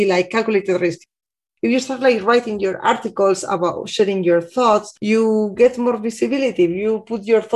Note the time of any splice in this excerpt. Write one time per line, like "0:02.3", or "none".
0:01.2